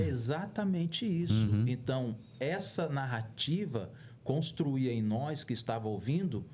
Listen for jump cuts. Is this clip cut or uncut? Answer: uncut